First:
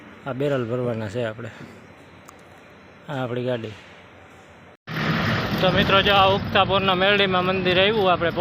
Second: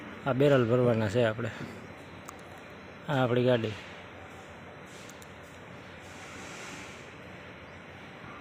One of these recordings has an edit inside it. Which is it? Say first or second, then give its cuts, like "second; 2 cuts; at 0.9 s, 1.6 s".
first; 1 cut; at 4.9 s